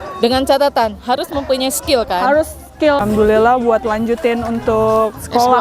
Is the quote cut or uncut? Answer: cut